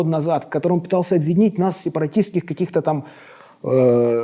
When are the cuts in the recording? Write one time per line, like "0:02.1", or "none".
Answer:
none